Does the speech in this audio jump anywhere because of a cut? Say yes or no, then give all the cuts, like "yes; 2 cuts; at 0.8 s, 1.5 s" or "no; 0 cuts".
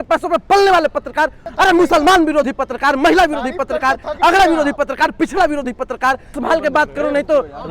yes; 2 cuts; at 1.4 s, 6.4 s